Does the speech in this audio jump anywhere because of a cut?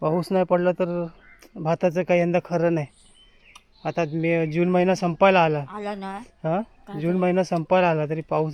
no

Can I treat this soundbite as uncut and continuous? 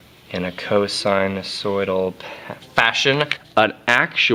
yes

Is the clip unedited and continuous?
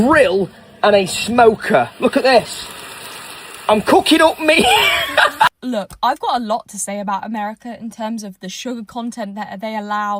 no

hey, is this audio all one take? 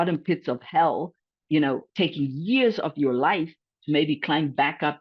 yes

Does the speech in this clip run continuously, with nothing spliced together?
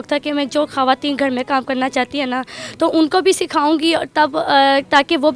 yes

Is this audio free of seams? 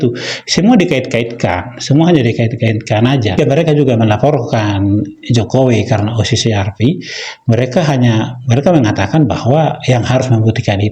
no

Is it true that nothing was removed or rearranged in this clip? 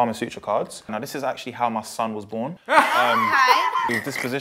no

